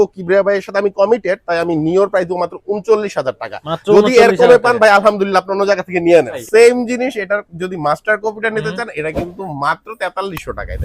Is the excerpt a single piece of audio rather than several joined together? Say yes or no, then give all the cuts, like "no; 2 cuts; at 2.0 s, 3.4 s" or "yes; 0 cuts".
no; 1 cut; at 6.4 s